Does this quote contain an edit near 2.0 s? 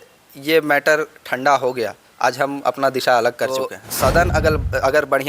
no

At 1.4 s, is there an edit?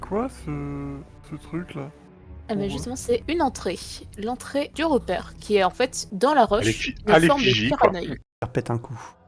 no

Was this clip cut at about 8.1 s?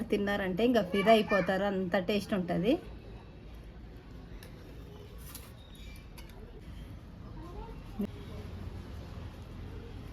yes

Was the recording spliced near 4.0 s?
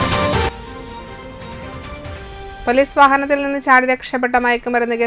no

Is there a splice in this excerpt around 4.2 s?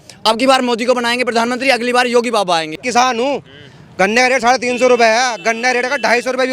no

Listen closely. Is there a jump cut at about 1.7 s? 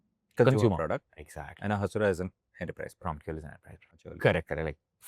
no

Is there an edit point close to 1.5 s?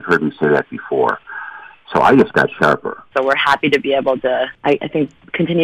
no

